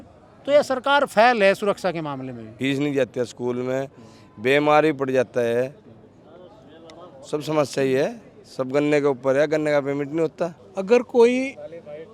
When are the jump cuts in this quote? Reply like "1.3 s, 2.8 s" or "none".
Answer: 2.4 s, 10.6 s